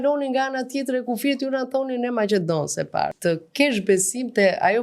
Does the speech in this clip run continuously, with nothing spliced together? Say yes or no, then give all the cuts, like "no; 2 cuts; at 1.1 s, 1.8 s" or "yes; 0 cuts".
no; 1 cut; at 3.1 s